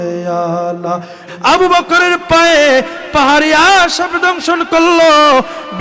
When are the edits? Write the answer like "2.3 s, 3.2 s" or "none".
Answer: 1.3 s